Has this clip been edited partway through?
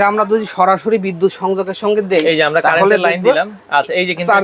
no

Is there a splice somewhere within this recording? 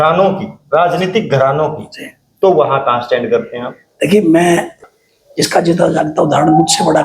yes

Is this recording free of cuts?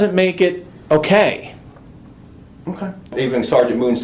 no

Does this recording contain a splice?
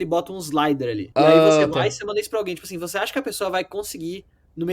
yes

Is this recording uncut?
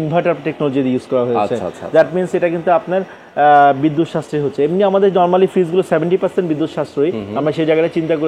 yes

